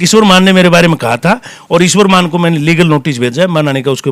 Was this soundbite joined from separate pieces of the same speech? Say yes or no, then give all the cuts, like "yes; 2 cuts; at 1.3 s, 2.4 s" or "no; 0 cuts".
no; 0 cuts